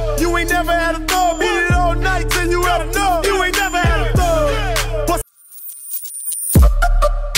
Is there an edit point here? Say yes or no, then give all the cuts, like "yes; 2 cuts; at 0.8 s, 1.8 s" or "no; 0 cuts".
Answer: yes; 1 cut; at 5.3 s